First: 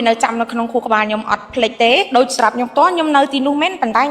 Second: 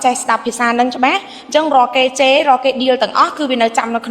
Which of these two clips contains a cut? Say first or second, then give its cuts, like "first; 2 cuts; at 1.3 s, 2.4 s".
first; 1 cut; at 2.1 s